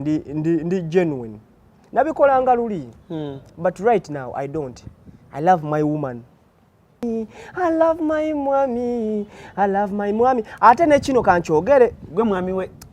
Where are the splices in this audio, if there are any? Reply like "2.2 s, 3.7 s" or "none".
7.0 s